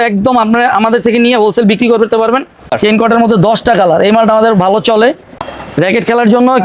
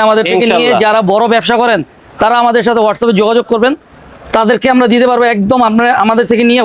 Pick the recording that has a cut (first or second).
first